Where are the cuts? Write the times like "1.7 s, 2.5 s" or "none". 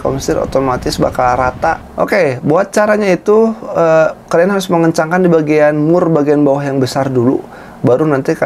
1.8 s